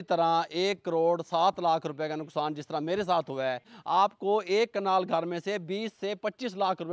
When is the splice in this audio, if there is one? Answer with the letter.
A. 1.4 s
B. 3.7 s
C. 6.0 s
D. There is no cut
B